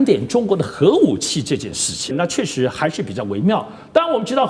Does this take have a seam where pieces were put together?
yes; 1 cut; at 2.2 s

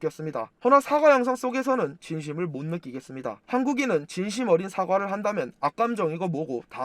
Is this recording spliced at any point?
yes; 1 cut; at 3.4 s

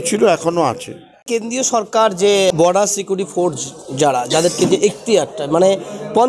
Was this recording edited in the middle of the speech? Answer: yes; 2 cuts; at 1.3 s, 2.5 s

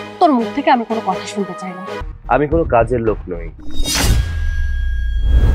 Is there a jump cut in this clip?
yes; 1 cut; at 1.9 s

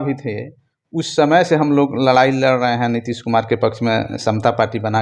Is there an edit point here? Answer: no; 0 cuts

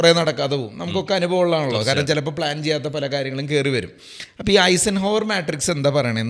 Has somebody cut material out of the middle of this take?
no; 0 cuts

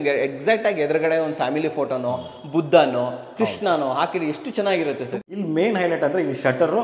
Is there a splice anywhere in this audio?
yes; 1 cut; at 5.1 s

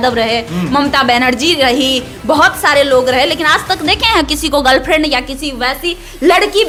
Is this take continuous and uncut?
yes; 0 cuts

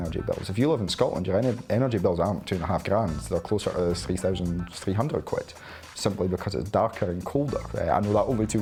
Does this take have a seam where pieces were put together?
no; 0 cuts

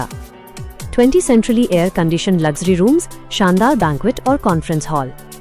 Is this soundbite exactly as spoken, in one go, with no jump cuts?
yes; 0 cuts

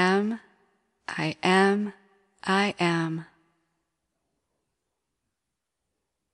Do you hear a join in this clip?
no; 0 cuts

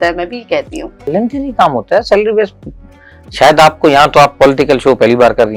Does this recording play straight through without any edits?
no; 1 cut; at 1.1 s

